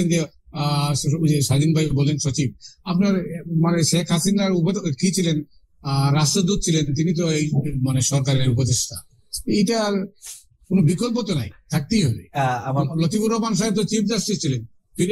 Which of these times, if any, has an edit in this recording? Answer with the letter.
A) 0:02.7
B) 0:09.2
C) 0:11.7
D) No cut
D